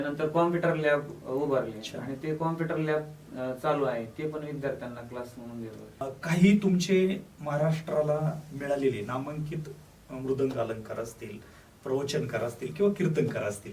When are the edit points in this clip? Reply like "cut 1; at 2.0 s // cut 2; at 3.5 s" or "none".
cut 1; at 6.0 s